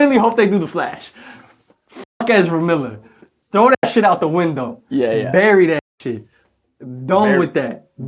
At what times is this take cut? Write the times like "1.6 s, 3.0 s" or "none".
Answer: none